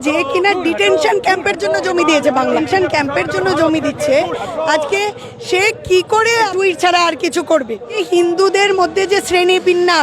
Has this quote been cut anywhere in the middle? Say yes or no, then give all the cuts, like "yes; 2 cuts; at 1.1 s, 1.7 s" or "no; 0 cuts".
yes; 3 cuts; at 2.6 s, 6.5 s, 8.0 s